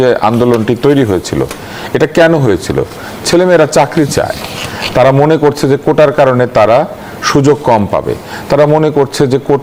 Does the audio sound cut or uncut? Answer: uncut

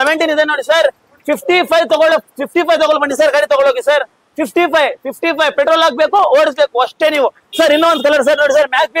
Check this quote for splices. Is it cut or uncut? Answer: uncut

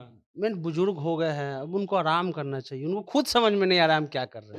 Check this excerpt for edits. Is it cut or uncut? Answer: uncut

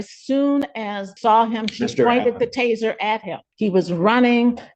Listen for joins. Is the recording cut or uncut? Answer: cut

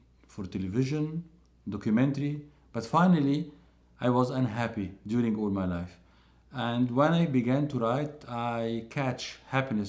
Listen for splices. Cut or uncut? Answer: uncut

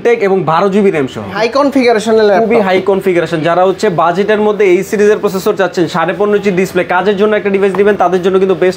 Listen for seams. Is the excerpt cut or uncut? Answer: cut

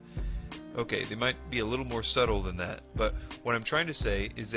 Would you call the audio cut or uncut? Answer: cut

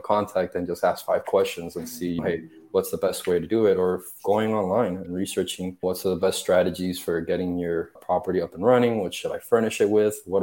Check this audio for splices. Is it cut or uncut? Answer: uncut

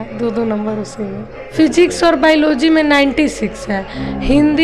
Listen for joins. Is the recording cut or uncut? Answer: cut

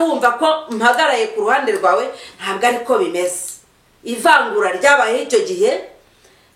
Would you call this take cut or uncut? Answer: uncut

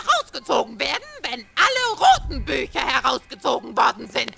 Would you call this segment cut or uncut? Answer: uncut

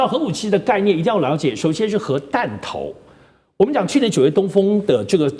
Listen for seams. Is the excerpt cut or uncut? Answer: uncut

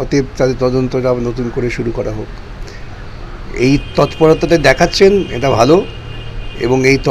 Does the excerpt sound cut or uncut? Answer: uncut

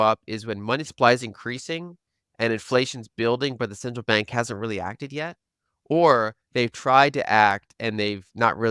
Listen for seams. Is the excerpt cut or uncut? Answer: uncut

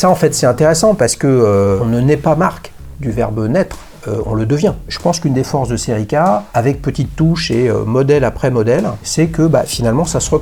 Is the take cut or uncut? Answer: cut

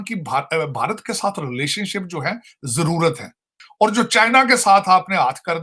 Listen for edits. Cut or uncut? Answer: cut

